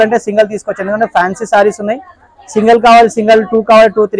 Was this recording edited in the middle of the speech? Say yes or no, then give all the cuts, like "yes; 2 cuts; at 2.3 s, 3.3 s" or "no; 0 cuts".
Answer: no; 0 cuts